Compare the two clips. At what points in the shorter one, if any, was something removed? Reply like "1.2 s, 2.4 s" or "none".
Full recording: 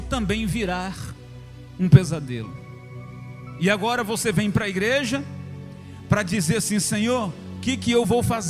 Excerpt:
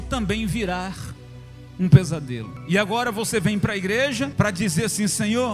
2.5 s, 4.3 s